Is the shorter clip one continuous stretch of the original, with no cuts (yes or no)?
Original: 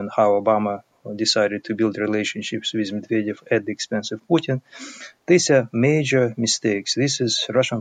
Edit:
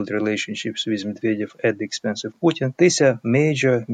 no